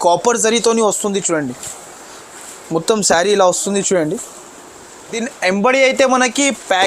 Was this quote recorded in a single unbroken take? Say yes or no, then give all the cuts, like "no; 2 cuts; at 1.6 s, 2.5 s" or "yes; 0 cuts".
no; 1 cut; at 5.2 s